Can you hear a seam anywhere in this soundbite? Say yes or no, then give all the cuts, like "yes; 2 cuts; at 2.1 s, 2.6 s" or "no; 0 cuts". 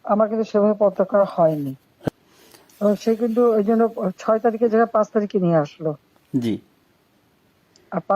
yes; 1 cut; at 1.9 s